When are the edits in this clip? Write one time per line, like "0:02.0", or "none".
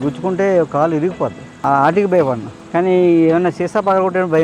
none